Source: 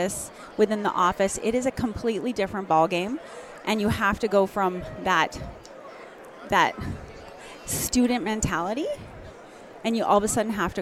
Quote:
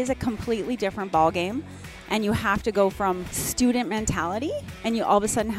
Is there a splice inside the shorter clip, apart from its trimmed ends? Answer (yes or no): yes